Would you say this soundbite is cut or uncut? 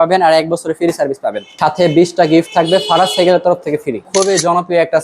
cut